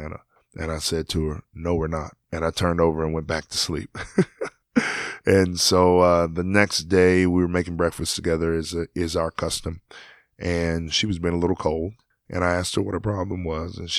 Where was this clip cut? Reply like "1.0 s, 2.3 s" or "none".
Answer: none